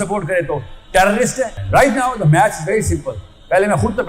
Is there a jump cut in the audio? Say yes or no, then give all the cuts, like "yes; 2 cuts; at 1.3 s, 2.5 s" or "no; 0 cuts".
yes; 1 cut; at 1.6 s